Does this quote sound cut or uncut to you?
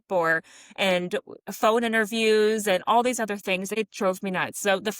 cut